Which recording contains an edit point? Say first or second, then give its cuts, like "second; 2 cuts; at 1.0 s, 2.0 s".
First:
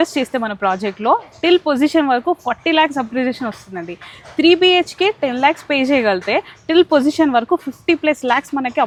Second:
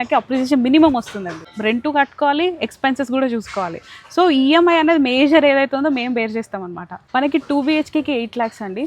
second; 2 cuts; at 1.5 s, 7.0 s